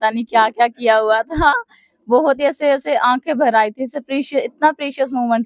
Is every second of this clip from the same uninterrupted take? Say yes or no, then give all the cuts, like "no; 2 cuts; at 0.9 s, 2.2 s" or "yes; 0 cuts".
yes; 0 cuts